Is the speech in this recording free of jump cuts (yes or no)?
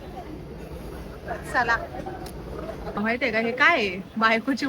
no